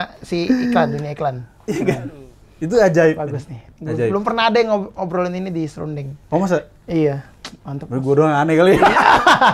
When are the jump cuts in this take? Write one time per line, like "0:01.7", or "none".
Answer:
0:01.5